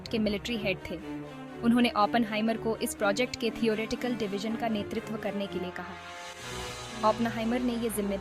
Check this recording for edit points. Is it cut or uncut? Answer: uncut